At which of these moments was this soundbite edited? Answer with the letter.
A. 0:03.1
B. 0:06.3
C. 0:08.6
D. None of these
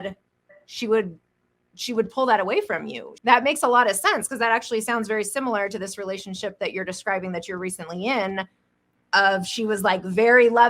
A